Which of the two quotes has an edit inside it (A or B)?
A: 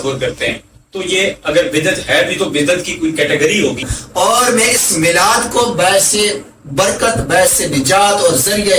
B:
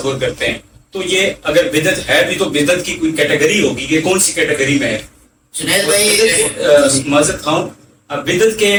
A